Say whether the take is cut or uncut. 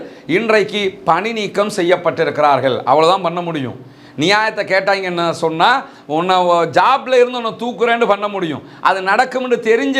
uncut